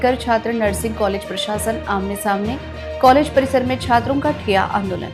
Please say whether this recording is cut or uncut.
uncut